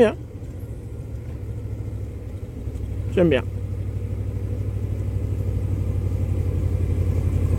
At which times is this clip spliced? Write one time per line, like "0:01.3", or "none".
none